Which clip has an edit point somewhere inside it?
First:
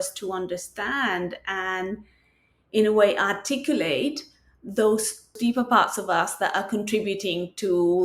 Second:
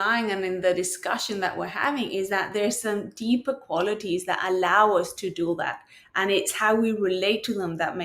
first; 1 cut; at 5.4 s

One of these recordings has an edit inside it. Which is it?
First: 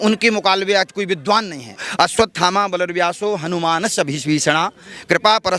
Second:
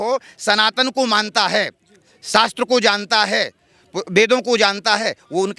first; 1 cut; at 1.8 s

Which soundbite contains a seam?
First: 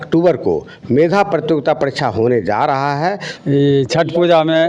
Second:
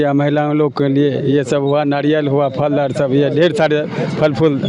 first; 1 cut; at 3.3 s

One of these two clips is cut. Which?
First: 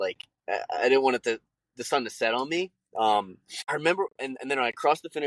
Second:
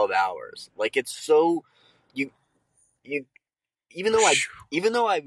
first; 1 cut; at 3.7 s

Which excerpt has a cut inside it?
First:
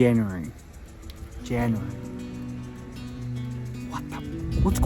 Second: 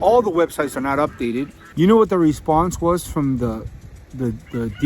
second; 1 cut; at 1.6 s

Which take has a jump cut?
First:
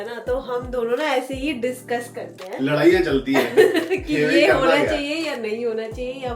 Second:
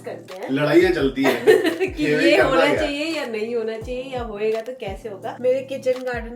second; 1 cut; at 5.4 s

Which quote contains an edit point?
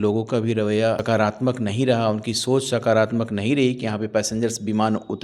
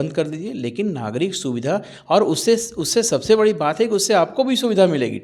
first; 1 cut; at 1.0 s

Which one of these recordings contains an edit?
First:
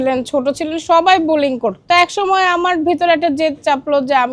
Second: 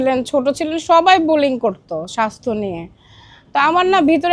first; 1 cut; at 1.8 s

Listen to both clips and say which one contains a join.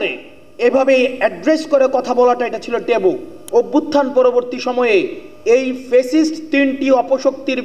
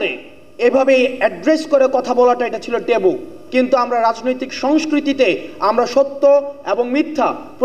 first; 1 cut; at 3.3 s

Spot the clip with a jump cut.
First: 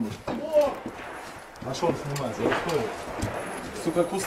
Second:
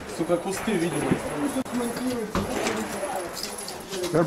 first; 1 cut; at 1.1 s

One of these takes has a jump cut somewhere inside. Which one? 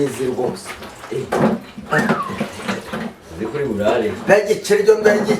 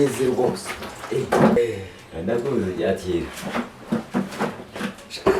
second; 1 cut; at 1.6 s

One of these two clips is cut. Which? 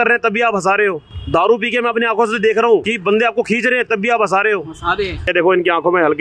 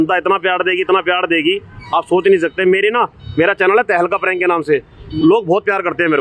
first; 3 cuts; at 1.1 s, 2.9 s, 5.2 s

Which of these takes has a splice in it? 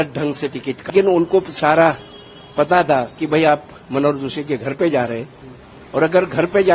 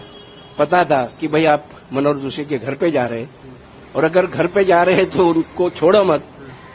first; 1 cut; at 0.9 s

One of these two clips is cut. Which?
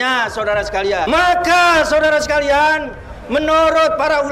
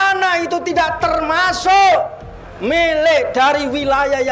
first; 1 cut; at 1.1 s

